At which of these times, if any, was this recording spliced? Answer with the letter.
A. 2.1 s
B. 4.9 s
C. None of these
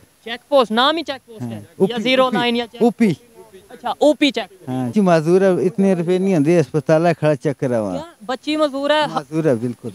B